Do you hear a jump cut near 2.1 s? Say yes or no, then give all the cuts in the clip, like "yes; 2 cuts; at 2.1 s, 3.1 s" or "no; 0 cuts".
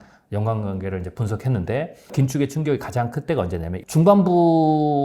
yes; 2 cuts; at 2.1 s, 3.8 s